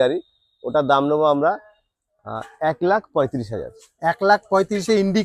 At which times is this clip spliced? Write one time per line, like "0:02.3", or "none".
none